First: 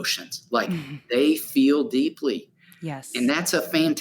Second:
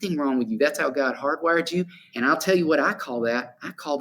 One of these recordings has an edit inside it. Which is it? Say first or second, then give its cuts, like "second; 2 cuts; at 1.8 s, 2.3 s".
second; 1 cut; at 2.0 s